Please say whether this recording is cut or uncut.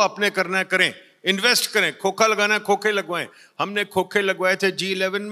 uncut